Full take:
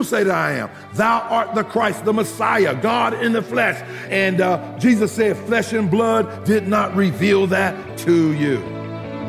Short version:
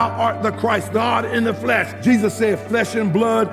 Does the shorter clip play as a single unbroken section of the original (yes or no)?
no